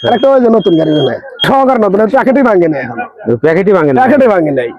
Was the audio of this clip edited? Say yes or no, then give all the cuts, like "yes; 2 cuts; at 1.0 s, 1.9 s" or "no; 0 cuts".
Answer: yes; 1 cut; at 1.4 s